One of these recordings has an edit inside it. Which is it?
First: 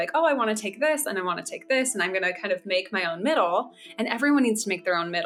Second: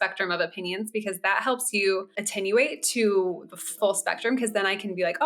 second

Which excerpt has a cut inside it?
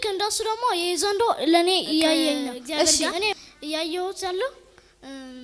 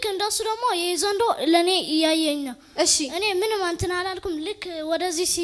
first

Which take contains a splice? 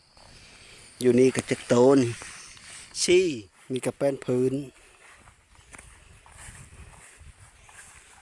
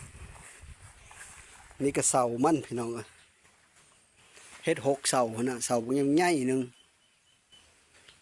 first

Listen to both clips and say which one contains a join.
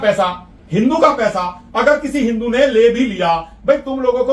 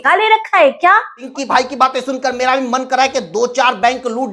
second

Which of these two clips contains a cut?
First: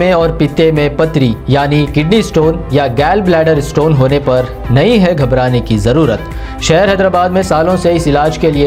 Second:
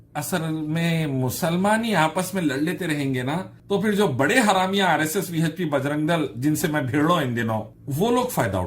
second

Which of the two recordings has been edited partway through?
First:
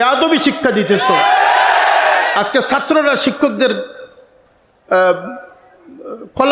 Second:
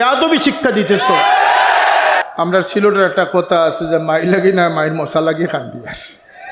second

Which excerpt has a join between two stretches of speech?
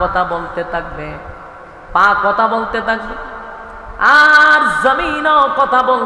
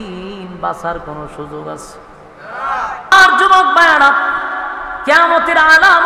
second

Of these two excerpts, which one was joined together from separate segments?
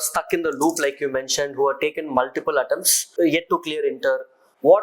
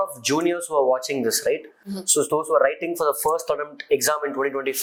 first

